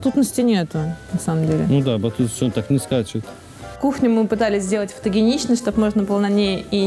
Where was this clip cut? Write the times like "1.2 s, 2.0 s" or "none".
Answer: 3.8 s